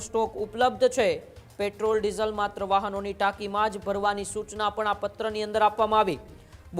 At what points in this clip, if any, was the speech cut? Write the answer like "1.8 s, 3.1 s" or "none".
none